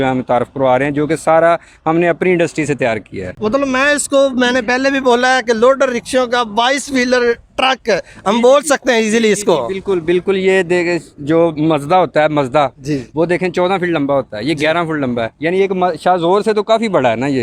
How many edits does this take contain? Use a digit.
0